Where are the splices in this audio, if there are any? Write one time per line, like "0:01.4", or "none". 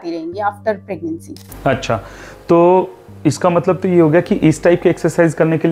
none